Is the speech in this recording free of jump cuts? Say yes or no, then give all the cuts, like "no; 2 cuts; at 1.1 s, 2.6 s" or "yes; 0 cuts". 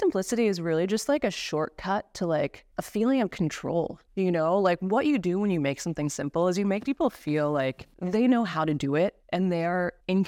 yes; 0 cuts